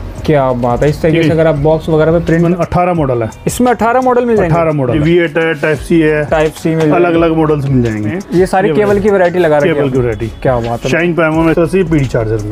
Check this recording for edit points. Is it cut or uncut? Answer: cut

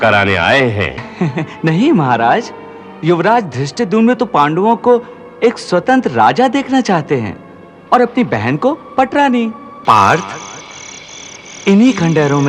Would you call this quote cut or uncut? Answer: cut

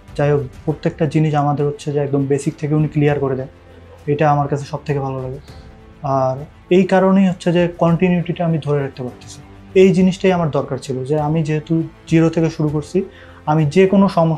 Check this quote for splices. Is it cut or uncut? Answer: cut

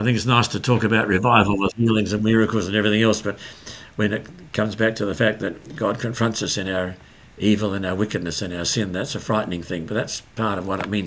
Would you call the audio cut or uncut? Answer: uncut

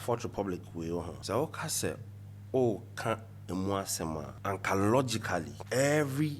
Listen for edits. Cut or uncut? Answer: cut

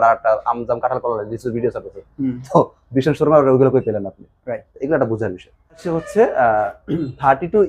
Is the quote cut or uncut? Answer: cut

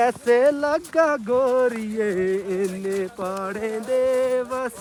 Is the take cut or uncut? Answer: uncut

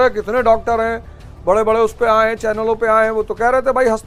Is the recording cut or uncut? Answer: uncut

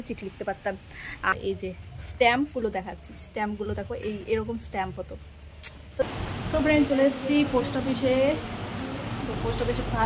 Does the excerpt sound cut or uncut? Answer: cut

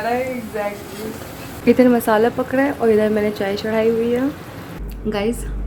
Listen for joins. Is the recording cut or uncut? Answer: uncut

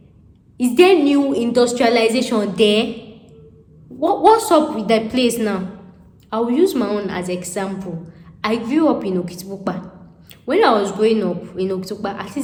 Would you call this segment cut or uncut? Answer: uncut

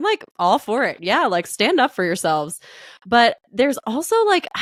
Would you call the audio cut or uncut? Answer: uncut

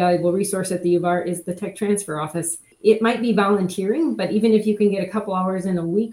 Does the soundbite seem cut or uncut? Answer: cut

